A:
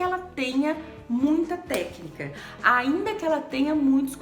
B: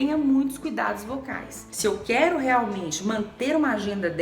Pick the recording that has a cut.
B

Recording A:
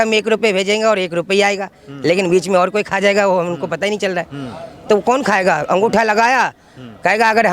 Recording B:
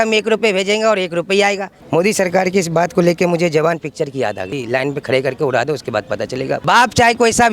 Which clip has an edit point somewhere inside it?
B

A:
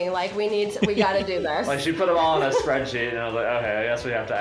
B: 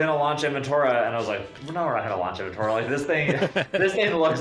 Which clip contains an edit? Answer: B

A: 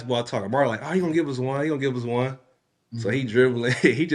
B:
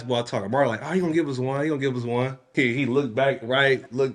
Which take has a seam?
B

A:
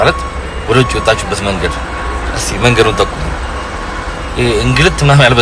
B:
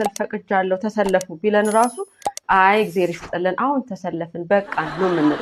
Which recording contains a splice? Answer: A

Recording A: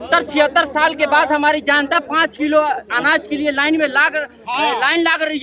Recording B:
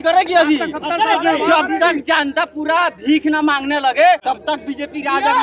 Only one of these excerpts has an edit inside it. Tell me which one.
B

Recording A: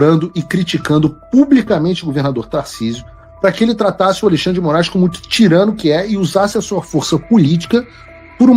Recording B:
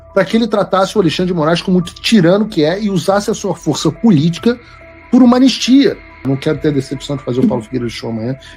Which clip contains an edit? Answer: B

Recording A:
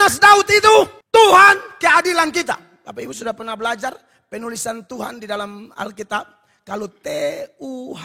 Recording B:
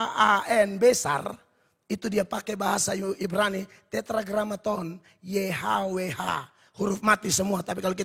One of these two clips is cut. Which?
A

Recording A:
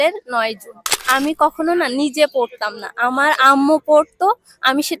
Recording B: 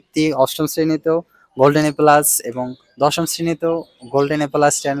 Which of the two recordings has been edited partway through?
A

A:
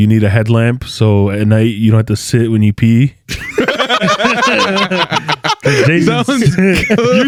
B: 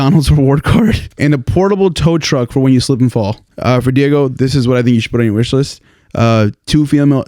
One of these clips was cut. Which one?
B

